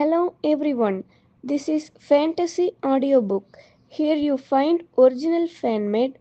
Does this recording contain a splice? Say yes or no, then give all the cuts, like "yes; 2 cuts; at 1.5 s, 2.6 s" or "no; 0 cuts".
no; 0 cuts